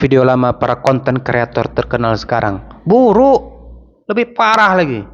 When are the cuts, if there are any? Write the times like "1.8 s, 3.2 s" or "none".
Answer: none